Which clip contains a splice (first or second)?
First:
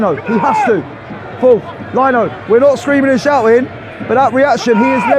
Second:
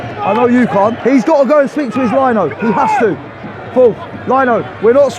second